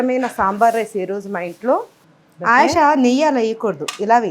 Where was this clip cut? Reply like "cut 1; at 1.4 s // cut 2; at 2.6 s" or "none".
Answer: cut 1; at 2.0 s